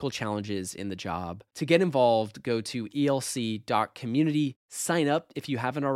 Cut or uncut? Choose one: uncut